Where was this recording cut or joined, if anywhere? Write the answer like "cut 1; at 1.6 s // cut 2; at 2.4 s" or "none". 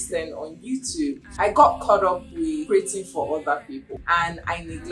cut 1; at 1.2 s // cut 2; at 2.6 s // cut 3; at 3.9 s